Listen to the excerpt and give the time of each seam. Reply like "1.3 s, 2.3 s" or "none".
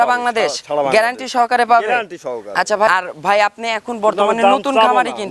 2.9 s